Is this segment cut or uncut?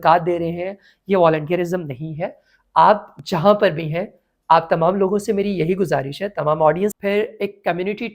cut